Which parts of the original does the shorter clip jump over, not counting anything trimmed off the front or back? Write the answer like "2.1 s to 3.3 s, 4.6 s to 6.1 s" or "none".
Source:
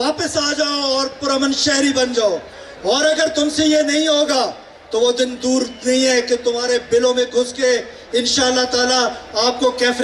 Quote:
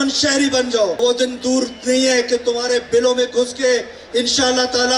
2.4 s to 5.0 s

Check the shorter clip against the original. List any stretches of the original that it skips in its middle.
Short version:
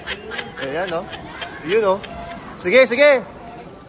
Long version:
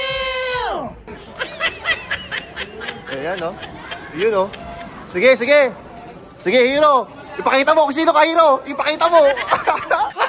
none

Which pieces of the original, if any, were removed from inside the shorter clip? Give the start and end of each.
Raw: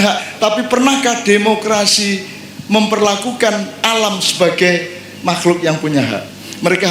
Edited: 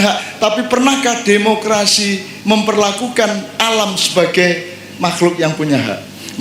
2.3 s to 2.5 s

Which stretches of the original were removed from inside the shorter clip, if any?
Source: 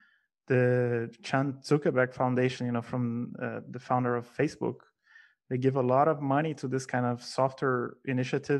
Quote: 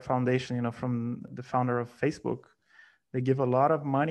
3.4 s to 3.7 s

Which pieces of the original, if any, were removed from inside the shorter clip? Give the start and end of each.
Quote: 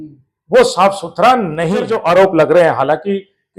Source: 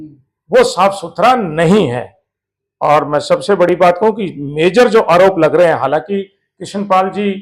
1.9 s to 4.9 s

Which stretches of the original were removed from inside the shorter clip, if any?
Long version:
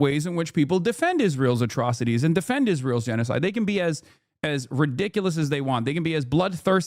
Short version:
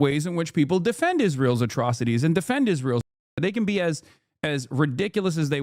none

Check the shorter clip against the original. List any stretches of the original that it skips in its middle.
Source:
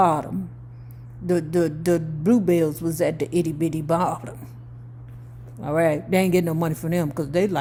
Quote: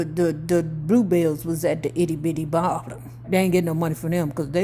4.6 s to 6.0 s

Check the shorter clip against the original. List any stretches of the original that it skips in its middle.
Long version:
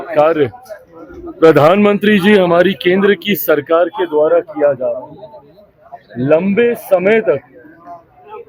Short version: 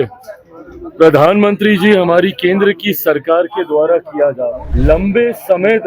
5.1 s to 6.1 s

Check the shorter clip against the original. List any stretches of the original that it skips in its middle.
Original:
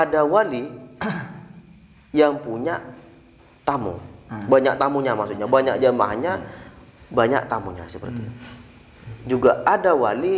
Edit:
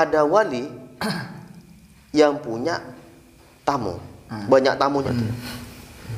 5.0 s to 8.0 s

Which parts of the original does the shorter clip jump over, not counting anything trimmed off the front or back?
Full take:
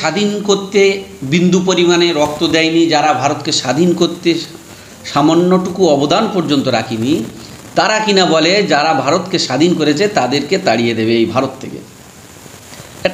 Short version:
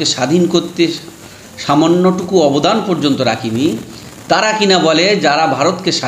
none

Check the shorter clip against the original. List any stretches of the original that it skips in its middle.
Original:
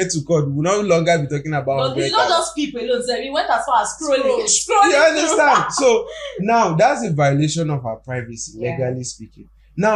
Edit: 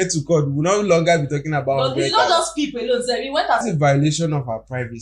3.6 s to 7.0 s

